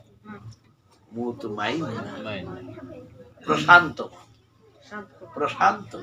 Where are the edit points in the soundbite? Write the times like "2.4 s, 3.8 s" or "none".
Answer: none